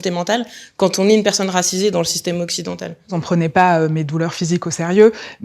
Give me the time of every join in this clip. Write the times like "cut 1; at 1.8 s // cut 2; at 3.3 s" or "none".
cut 1; at 3.2 s